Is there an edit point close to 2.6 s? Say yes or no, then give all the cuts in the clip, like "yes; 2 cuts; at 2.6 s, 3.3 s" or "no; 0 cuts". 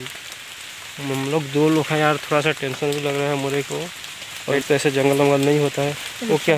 no; 1 cut; at 4.5 s